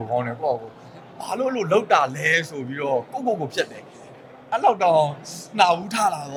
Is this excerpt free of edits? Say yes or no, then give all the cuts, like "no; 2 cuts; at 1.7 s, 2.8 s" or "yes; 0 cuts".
yes; 0 cuts